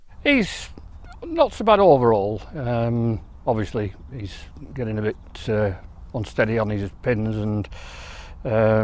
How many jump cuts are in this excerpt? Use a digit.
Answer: 1